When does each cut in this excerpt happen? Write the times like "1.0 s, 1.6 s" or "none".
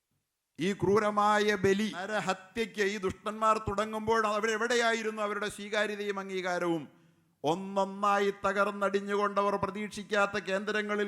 2.1 s